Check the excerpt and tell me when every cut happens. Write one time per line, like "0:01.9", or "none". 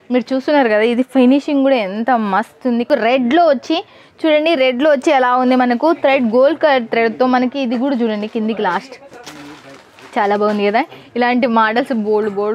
0:02.9